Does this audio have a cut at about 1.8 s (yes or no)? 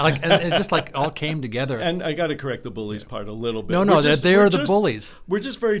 yes